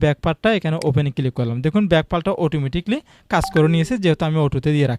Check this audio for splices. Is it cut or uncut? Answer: uncut